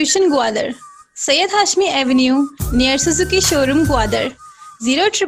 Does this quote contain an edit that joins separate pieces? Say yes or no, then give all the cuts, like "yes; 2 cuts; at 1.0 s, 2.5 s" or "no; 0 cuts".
no; 0 cuts